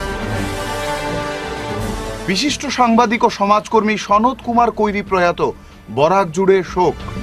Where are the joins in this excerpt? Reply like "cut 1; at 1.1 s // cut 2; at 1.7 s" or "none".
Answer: cut 1; at 1.4 s